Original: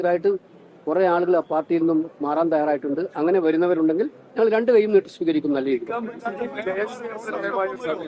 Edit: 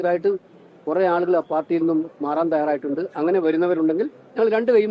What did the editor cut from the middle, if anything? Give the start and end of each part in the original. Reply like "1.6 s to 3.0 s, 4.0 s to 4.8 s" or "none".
none